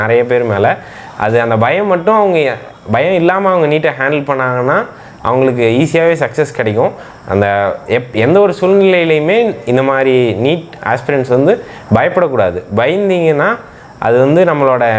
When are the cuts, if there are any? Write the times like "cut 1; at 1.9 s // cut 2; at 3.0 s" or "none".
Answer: none